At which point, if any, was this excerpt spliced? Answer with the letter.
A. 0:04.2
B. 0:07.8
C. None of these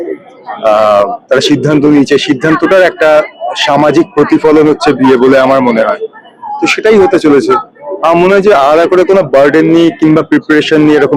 C